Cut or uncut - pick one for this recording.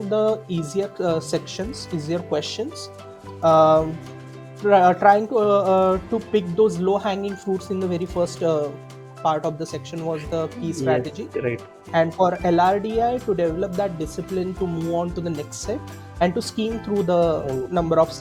uncut